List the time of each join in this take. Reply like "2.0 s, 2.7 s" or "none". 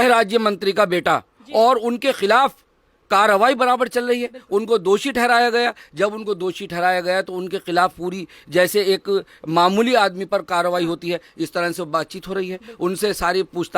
none